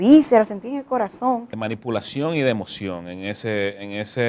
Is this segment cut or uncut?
cut